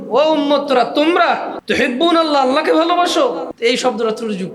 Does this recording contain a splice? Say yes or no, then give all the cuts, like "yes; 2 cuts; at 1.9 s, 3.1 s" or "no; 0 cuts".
yes; 2 cuts; at 1.6 s, 3.5 s